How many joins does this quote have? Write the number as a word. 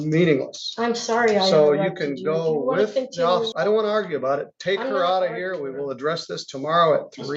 one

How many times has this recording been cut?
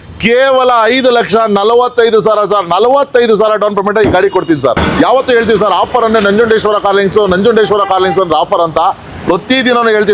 one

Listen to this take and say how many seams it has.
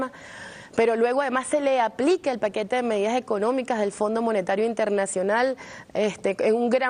one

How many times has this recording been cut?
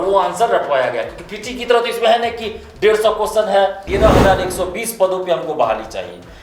one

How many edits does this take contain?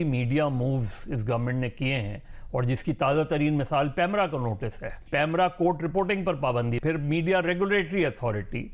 two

